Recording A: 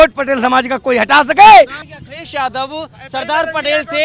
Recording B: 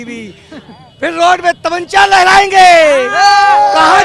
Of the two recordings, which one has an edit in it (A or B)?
A